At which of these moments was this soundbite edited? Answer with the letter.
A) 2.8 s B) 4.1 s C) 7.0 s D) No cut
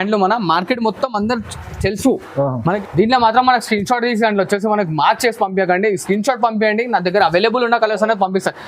A